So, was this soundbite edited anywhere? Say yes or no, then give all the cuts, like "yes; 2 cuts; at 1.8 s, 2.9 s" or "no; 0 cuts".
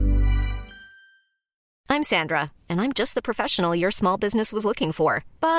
yes; 1 cut; at 1.6 s